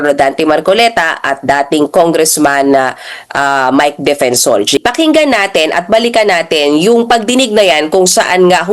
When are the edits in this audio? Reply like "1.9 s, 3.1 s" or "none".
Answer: 4.8 s